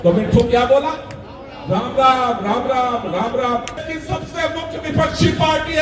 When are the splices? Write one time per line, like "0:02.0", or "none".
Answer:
0:03.9